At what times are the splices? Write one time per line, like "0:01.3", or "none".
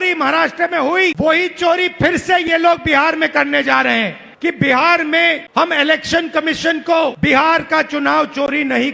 0:01.1
0:04.2
0:05.4
0:07.2